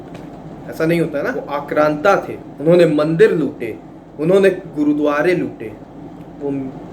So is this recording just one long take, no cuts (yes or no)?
no